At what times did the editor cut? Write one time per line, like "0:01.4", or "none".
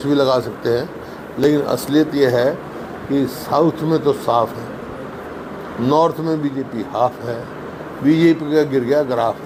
none

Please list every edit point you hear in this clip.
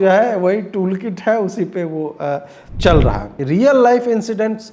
0:03.3

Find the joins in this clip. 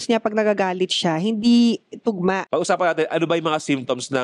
0:02.5

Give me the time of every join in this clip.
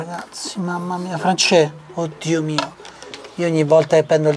0:01.8

